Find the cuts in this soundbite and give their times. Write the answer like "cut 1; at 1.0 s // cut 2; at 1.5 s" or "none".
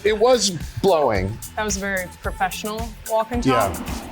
cut 1; at 1.4 s